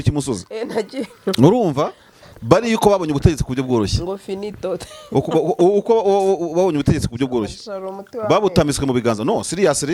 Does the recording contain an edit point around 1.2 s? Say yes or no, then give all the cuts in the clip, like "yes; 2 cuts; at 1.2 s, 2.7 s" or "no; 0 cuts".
no; 0 cuts